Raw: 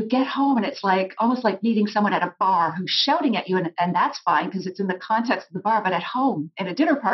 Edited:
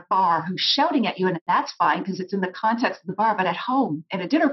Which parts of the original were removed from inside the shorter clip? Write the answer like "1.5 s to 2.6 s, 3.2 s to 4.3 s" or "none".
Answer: 3.7 s to 3.9 s